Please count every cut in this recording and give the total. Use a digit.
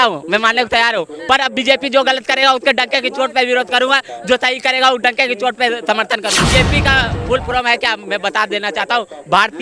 1